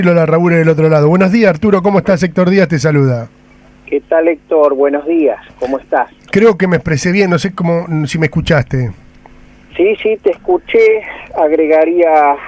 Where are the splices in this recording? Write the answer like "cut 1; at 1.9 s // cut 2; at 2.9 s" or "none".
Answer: cut 1; at 6.2 s